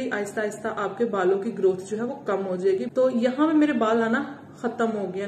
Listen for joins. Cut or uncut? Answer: cut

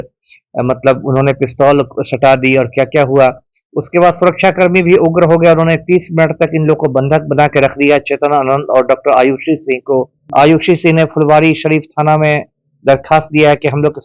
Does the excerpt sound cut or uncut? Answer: cut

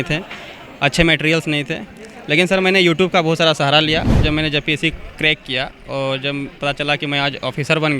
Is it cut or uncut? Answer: cut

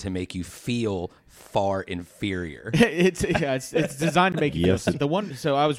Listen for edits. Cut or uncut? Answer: uncut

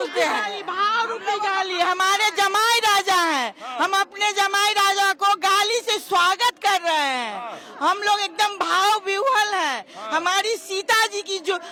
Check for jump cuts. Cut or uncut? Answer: uncut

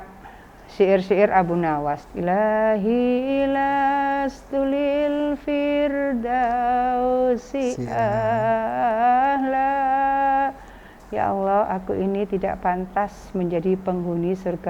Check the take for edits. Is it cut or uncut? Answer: cut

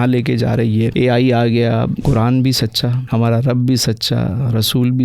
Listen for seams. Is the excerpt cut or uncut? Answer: cut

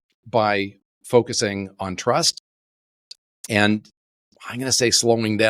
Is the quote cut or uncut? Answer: uncut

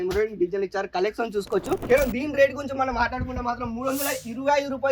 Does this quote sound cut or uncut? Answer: cut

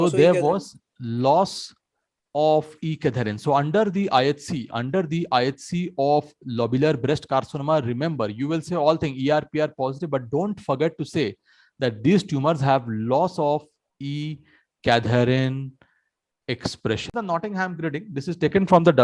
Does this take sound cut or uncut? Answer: cut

